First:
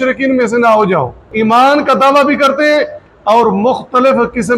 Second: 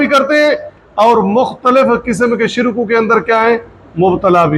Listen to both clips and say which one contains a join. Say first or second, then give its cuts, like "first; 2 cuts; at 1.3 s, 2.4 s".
first; 1 cut; at 1.3 s